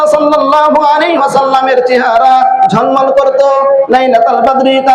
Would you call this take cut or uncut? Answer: cut